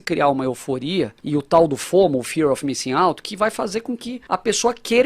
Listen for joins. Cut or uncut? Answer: cut